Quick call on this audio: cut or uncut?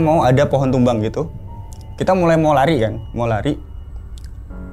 uncut